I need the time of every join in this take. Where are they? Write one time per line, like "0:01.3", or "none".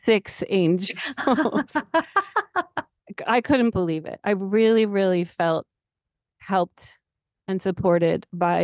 0:03.0